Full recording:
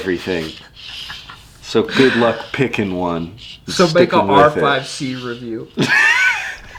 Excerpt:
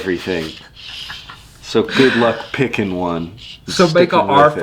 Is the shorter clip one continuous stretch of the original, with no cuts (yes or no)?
yes